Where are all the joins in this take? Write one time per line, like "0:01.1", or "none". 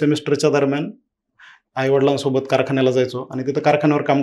none